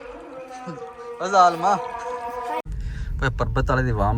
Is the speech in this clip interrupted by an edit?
yes; 1 cut; at 2.6 s

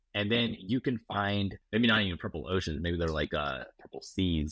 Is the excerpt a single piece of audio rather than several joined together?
no; 1 cut; at 1.6 s

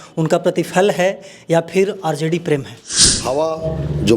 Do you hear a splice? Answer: yes; 1 cut; at 3.1 s

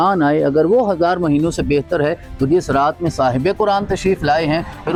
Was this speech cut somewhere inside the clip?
no; 0 cuts

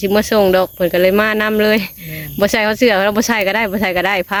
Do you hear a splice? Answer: no; 0 cuts

